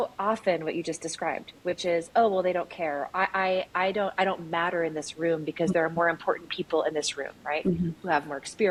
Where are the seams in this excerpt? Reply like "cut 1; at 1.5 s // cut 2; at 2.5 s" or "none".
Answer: none